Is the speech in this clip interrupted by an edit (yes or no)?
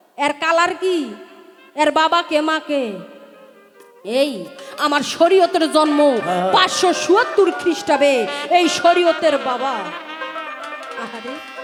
no